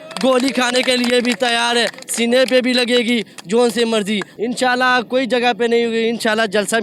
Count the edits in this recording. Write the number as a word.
one